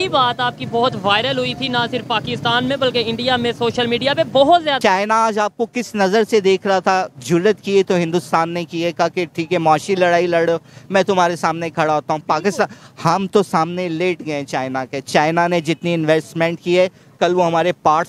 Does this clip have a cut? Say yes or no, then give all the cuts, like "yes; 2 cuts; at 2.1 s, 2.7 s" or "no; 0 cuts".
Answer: yes; 1 cut; at 4.8 s